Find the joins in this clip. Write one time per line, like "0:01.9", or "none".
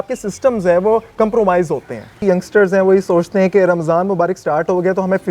0:02.2